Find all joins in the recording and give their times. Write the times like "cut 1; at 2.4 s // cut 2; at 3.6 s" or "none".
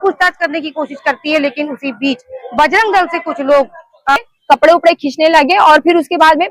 cut 1; at 4.2 s